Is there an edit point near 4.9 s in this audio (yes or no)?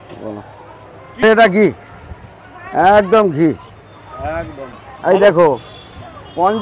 yes